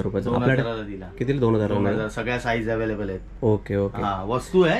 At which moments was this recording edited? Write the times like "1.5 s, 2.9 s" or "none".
none